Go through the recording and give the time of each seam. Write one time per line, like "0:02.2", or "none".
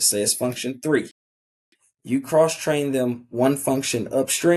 none